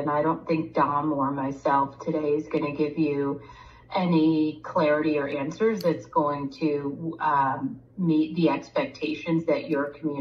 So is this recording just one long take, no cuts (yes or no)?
yes